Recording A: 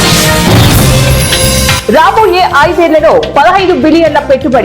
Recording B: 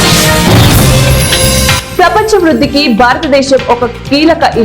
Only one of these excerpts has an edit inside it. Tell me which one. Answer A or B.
A